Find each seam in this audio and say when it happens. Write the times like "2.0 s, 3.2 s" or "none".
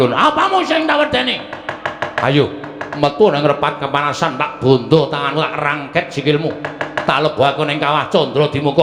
none